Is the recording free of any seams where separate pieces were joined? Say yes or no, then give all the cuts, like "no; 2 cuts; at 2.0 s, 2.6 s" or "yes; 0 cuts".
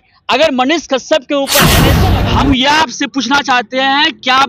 no; 1 cut; at 1.9 s